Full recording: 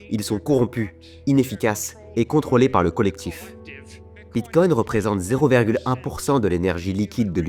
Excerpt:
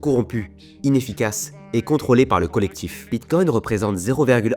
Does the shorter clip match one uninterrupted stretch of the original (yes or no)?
no